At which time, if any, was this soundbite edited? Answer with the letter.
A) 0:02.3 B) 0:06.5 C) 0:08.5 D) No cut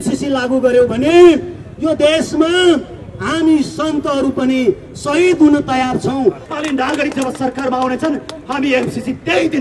B